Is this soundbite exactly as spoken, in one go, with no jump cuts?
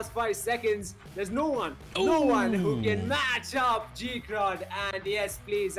yes; 0 cuts

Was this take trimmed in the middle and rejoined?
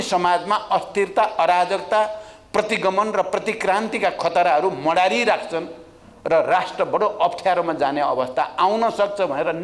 no; 0 cuts

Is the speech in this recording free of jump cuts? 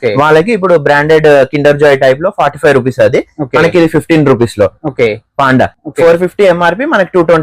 no; 1 cut; at 5.8 s

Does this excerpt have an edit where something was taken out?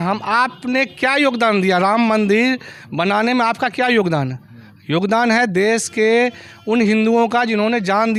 no; 0 cuts

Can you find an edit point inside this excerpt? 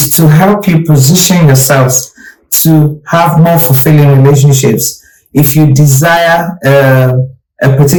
no; 0 cuts

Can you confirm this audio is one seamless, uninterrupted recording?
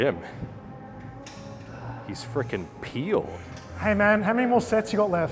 yes; 0 cuts

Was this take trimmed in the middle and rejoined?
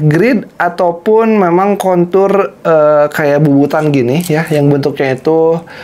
no; 0 cuts

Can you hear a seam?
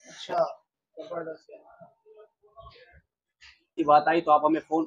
yes; 1 cut; at 3.7 s

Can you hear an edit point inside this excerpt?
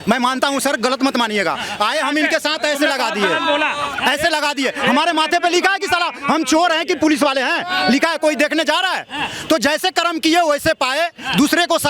no; 0 cuts

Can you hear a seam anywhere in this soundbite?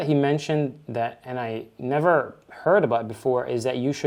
no; 0 cuts

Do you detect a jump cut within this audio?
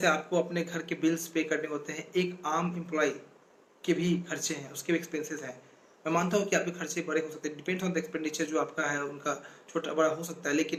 no; 0 cuts

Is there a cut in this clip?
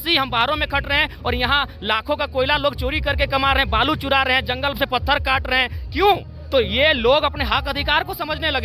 no; 0 cuts

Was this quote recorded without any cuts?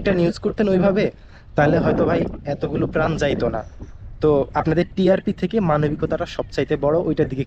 yes; 0 cuts

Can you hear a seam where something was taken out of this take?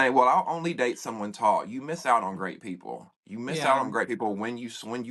no; 0 cuts

